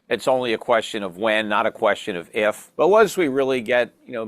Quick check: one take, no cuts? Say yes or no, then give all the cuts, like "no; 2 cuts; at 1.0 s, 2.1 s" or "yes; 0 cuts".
no; 1 cut; at 2.7 s